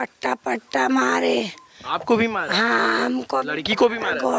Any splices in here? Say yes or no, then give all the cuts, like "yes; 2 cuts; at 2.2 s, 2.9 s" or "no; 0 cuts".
no; 0 cuts